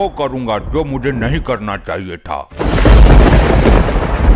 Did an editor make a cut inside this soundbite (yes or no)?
yes